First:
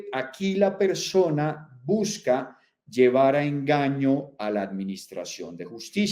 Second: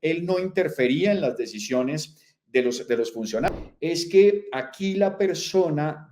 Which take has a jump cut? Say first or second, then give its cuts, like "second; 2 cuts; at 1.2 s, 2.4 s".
second; 1 cut; at 3.5 s